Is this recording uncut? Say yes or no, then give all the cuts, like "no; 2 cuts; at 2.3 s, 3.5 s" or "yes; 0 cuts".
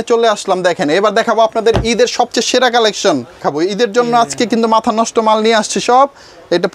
no; 1 cut; at 3.4 s